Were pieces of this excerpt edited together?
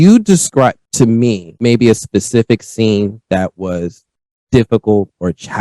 yes; 1 cut; at 1.2 s

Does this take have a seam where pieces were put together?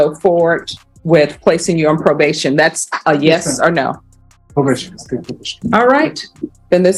no; 0 cuts

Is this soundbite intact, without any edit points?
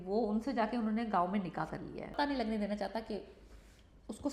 no; 1 cut; at 2.1 s

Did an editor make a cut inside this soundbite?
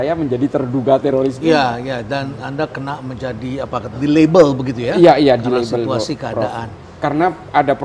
no; 0 cuts

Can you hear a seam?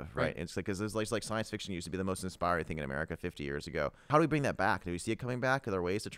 no; 0 cuts

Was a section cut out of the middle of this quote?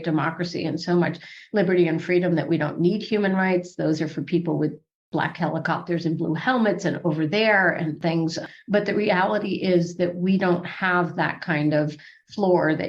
no; 0 cuts

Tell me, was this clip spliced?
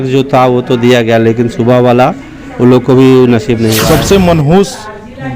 yes; 1 cut; at 3.8 s

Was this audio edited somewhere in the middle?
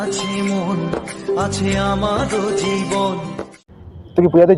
no; 0 cuts

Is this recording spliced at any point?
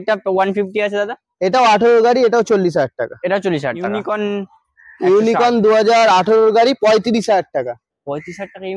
yes; 1 cut; at 4.0 s

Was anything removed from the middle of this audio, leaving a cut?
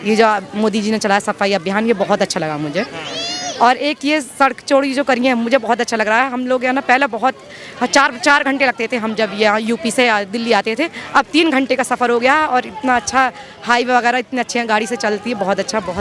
no; 0 cuts

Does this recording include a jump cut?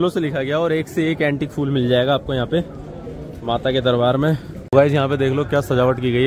yes; 1 cut; at 4.5 s

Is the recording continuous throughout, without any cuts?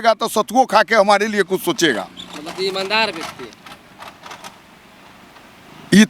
yes; 0 cuts

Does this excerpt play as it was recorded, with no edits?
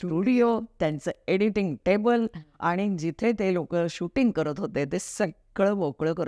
yes; 0 cuts

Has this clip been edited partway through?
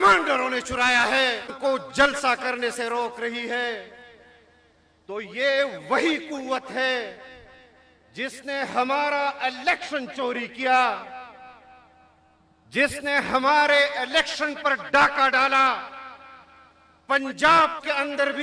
yes; 1 cut; at 1.5 s

